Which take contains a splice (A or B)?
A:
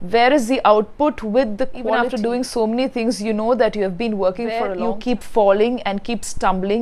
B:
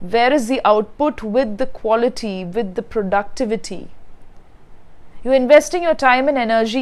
A